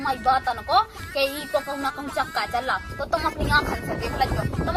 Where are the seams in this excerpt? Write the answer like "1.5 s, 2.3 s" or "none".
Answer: none